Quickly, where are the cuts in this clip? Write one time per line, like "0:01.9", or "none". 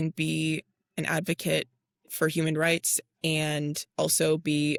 none